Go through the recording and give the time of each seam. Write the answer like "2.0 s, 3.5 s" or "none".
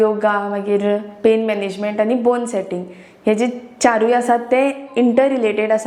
none